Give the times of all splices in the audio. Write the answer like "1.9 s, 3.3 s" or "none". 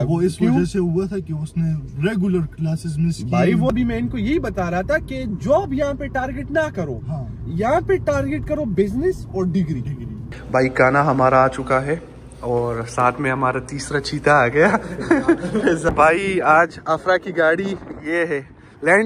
3.7 s, 10.2 s, 15.9 s